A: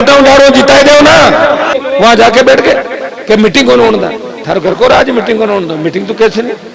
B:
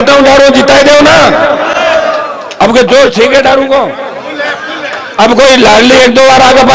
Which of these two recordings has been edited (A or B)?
A